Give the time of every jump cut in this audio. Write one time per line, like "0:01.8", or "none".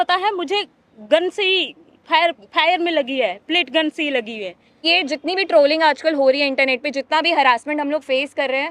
0:04.8